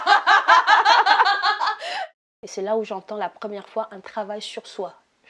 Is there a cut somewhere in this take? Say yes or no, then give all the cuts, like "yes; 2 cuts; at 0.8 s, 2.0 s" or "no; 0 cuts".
yes; 1 cut; at 1.9 s